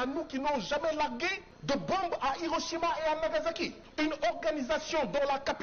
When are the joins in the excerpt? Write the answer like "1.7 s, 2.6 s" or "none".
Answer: 1.5 s, 3.8 s